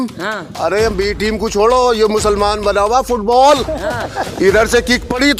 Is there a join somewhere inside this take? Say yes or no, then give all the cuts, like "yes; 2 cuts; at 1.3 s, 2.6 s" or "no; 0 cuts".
no; 0 cuts